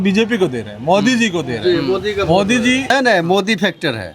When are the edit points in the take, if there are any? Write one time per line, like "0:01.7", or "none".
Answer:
0:02.9